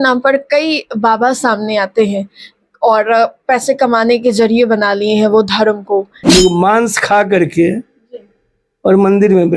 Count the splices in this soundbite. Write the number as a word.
one